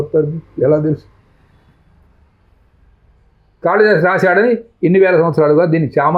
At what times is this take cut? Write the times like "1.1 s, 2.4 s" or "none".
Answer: none